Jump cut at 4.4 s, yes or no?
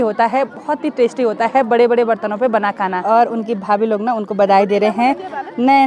no